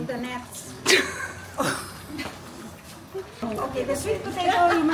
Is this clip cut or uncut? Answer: cut